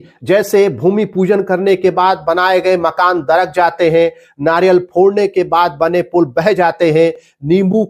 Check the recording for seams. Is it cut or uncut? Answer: uncut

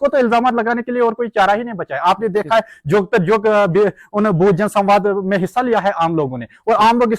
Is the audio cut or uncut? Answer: uncut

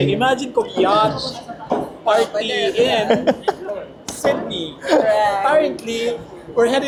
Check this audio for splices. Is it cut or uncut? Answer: uncut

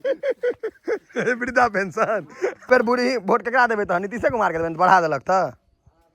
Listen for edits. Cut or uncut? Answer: cut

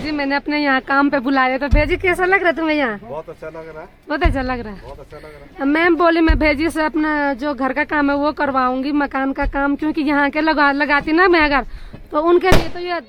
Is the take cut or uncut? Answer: uncut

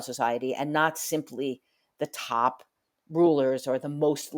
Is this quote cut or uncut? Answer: uncut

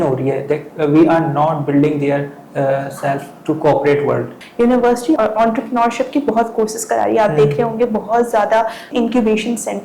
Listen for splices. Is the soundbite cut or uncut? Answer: cut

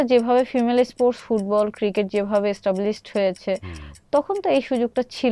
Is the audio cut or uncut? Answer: uncut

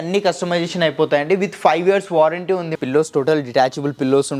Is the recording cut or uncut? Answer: cut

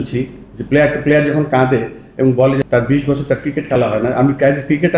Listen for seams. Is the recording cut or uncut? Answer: cut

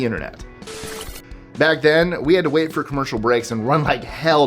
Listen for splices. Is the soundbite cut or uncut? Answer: cut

